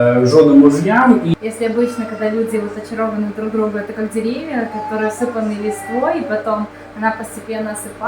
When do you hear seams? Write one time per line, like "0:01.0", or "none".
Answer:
0:01.3